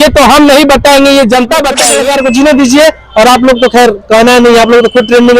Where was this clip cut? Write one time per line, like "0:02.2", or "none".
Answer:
0:01.9